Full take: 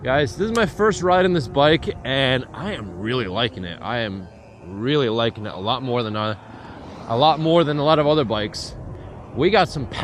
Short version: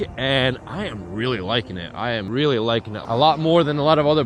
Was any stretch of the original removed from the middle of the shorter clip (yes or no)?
yes